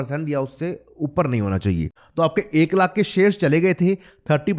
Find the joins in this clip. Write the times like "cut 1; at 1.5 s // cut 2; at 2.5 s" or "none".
cut 1; at 2.0 s